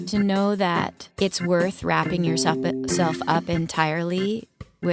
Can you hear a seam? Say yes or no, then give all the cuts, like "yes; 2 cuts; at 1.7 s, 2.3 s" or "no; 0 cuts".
yes; 1 cut; at 1.0 s